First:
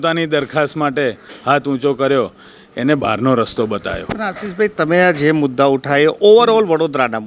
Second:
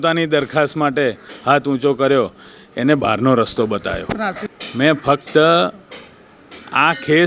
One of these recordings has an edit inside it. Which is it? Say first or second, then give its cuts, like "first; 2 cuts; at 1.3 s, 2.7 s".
second; 1 cut; at 4.4 s